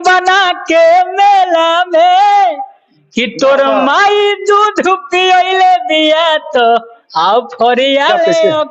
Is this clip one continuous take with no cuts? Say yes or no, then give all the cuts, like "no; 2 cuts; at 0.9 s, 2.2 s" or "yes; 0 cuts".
yes; 0 cuts